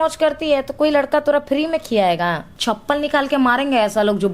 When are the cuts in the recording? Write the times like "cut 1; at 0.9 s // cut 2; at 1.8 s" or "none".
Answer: cut 1; at 2.5 s